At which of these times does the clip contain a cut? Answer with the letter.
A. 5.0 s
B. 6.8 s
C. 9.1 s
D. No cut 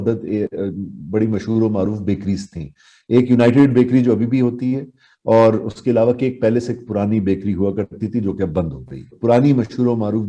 C